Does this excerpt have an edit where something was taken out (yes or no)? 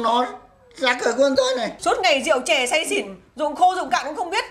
yes